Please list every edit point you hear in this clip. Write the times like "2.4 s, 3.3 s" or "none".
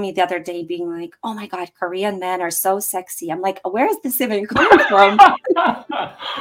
none